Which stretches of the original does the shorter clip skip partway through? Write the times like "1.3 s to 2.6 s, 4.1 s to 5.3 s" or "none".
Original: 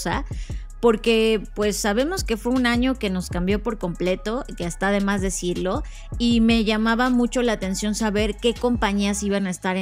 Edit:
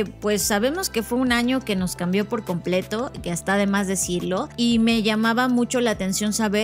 5.8 s to 6.1 s